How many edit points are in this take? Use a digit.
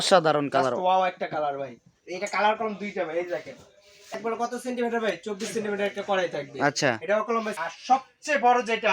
2